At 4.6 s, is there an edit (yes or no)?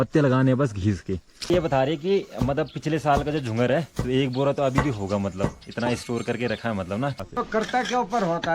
no